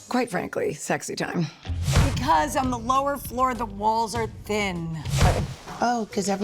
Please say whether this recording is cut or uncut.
cut